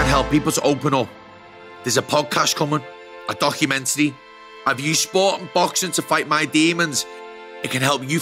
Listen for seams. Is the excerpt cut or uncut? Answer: uncut